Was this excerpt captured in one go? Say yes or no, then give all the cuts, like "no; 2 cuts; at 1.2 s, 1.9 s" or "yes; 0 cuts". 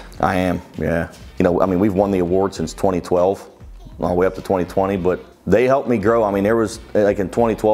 yes; 0 cuts